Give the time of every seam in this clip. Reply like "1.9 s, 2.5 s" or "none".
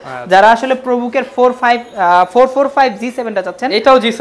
none